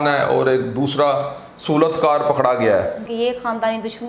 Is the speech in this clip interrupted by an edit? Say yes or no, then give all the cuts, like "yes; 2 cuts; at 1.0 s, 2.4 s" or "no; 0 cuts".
yes; 1 cut; at 3.0 s